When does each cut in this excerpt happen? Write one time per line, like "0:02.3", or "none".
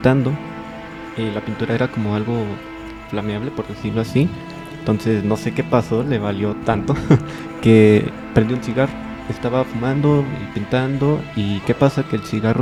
none